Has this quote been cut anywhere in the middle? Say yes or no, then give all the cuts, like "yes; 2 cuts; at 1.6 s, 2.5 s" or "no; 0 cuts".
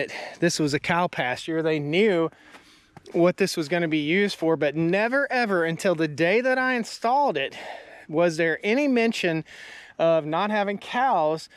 no; 0 cuts